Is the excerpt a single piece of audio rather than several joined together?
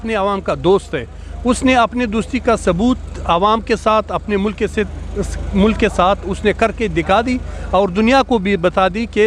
yes; 0 cuts

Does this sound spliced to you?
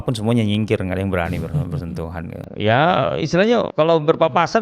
yes; 1 cut; at 3.7 s

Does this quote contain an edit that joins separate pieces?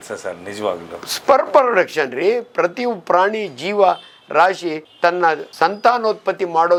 no; 0 cuts

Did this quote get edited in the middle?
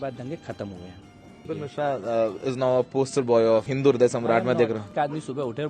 yes; 3 cuts; at 1.5 s, 3.7 s, 4.9 s

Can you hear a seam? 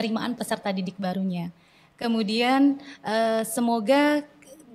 no; 0 cuts

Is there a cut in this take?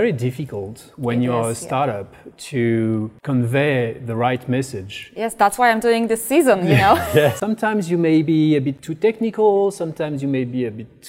yes; 3 cuts; at 3.1 s, 7.4 s, 8.8 s

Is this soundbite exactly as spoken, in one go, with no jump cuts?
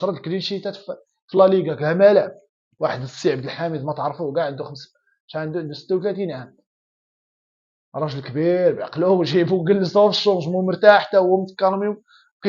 yes; 0 cuts

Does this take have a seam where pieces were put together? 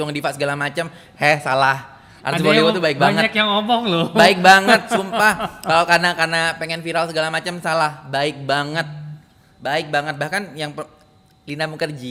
no; 0 cuts

